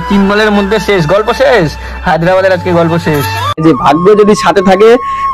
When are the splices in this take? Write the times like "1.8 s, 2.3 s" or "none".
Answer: 3.6 s